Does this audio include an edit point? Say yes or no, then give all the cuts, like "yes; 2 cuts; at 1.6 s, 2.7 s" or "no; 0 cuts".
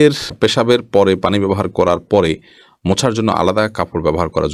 no; 0 cuts